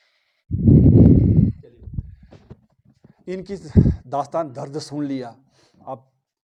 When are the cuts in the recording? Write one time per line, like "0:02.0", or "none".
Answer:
none